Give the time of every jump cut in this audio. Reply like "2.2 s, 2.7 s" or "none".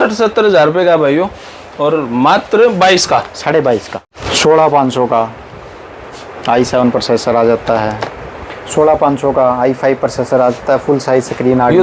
4.4 s